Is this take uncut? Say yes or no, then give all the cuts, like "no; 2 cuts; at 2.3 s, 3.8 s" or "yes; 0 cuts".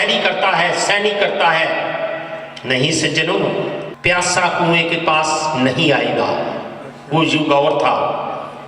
no; 1 cut; at 3.9 s